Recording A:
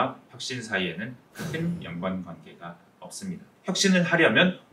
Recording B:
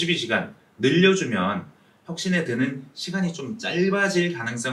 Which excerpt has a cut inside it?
A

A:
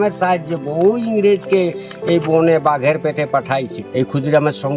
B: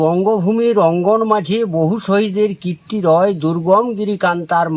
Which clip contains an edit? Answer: A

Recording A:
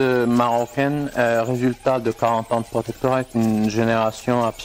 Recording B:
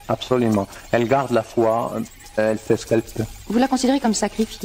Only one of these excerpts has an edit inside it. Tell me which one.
B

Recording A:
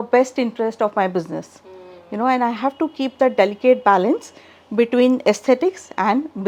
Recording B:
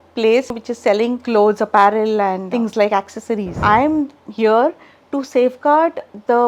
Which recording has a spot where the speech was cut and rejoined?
B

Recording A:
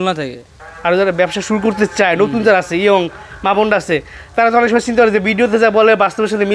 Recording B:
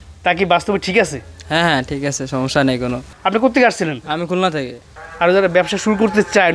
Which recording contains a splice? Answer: B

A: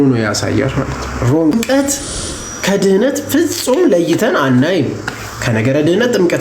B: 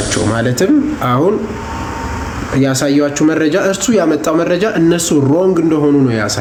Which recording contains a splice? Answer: A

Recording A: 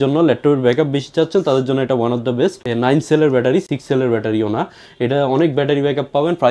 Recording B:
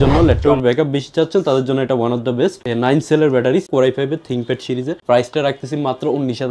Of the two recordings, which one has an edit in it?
B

